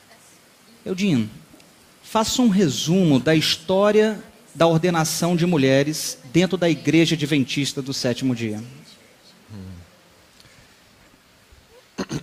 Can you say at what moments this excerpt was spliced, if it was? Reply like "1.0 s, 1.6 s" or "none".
none